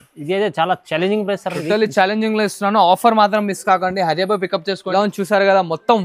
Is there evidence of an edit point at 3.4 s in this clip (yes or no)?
no